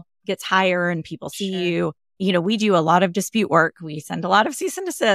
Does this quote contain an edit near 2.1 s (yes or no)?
yes